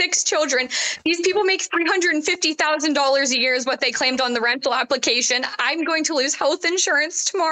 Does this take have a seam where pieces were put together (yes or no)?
no